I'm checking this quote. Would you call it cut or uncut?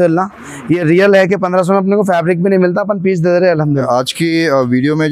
uncut